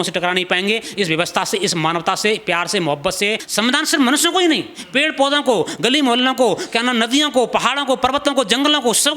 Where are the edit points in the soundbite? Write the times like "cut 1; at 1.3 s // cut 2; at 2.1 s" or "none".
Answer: cut 1; at 3.4 s